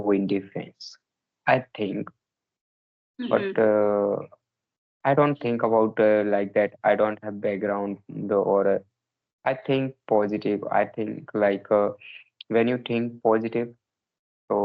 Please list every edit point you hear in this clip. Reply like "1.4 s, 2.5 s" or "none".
none